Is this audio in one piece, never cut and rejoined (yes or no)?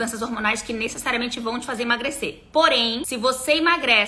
no